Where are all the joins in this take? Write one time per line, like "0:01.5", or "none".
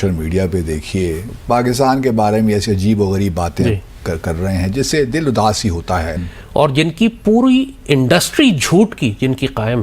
0:01.3
0:06.2